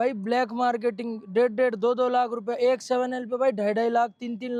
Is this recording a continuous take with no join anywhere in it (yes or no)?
yes